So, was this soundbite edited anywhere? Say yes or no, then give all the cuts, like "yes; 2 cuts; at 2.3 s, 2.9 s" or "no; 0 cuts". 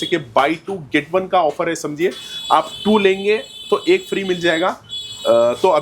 no; 0 cuts